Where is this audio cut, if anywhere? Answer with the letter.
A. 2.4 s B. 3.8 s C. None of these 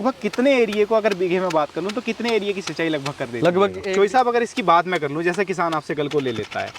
B